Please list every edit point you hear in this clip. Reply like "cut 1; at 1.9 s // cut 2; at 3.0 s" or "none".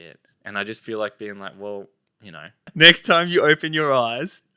cut 1; at 2.6 s